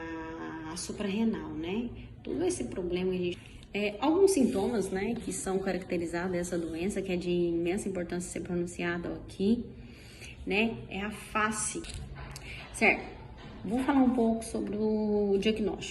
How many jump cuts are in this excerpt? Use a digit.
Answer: 2